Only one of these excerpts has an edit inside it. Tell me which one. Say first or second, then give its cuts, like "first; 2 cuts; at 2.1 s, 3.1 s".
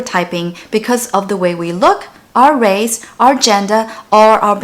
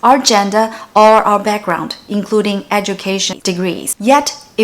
second; 1 cut; at 3.3 s